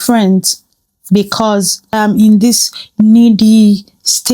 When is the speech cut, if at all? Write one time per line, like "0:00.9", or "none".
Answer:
0:01.9